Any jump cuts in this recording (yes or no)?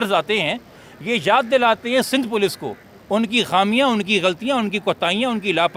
no